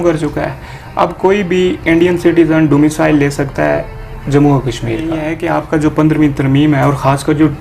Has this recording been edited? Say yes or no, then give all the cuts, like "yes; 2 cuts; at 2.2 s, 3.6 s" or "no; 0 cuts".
yes; 1 cut; at 5.3 s